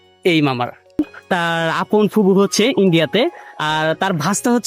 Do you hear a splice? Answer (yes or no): yes